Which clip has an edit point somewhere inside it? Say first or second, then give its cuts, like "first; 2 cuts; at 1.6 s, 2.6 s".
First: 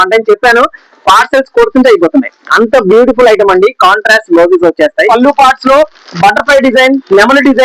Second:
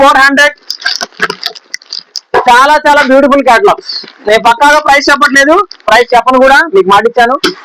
first; 1 cut; at 5.1 s